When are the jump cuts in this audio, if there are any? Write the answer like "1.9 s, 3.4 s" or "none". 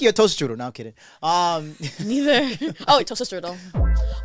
none